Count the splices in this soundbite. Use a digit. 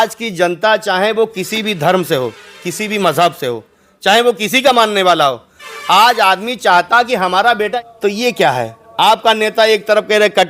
1